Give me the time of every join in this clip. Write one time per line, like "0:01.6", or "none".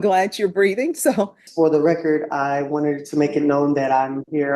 0:01.4